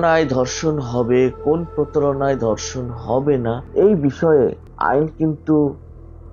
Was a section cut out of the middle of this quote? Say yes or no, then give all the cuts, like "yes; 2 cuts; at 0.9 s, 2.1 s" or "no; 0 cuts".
yes; 2 cuts; at 3.6 s, 4.7 s